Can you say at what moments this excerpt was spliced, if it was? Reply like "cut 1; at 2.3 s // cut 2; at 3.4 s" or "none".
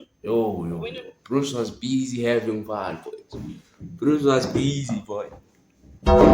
cut 1; at 5.4 s

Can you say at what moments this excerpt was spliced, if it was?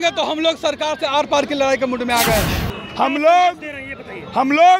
cut 1; at 2.6 s

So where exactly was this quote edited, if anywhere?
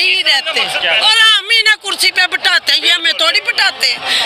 cut 1; at 1.0 s

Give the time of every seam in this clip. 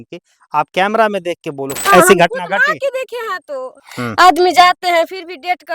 cut 1; at 1.8 s // cut 2; at 3.8 s

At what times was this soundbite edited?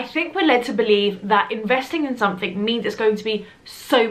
none

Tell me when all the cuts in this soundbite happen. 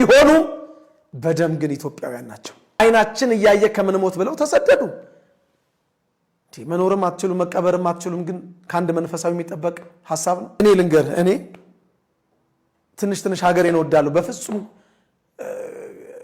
cut 1; at 2.8 s // cut 2; at 10.6 s

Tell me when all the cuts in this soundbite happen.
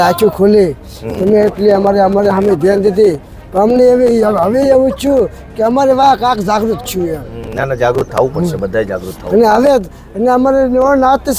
none

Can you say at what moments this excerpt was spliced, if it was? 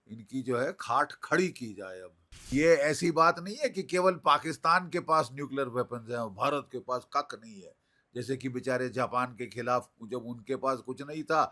cut 1; at 2.5 s

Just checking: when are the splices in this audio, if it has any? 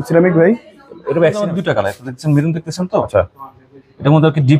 cut 1; at 1.5 s

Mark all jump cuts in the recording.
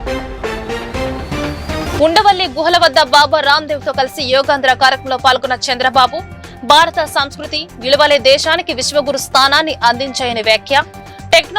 cut 1; at 1.9 s

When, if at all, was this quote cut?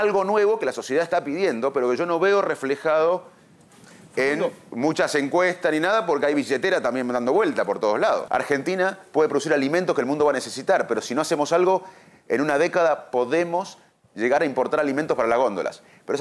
cut 1; at 8.2 s

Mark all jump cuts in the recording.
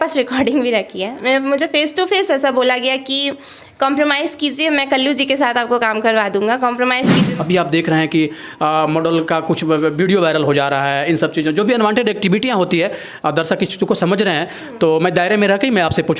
cut 1; at 7.2 s

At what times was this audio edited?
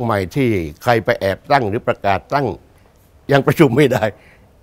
none

